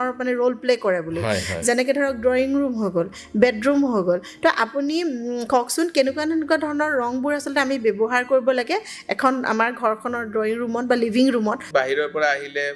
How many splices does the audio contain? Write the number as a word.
one